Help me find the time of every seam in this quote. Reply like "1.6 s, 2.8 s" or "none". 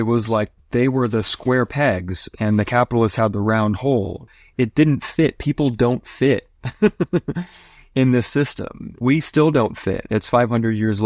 9.0 s